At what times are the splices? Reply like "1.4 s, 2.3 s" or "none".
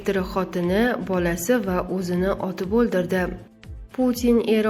3.5 s